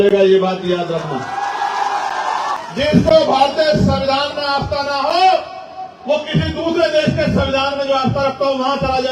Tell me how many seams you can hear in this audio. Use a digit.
1